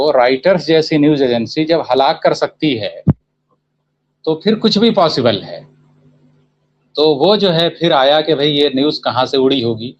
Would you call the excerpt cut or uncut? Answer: uncut